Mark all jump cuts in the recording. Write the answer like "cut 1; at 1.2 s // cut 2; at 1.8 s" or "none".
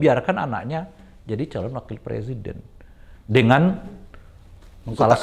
none